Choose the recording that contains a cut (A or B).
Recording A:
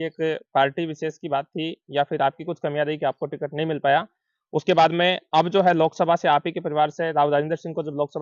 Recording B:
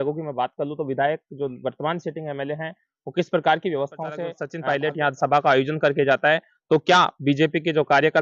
B